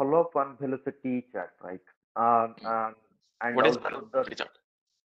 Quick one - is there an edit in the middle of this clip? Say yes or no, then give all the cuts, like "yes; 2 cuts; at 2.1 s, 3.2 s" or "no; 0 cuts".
no; 0 cuts